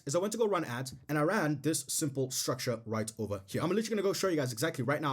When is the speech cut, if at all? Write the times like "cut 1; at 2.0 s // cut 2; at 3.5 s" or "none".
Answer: cut 1; at 3.5 s